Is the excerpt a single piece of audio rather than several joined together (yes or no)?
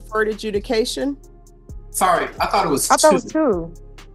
yes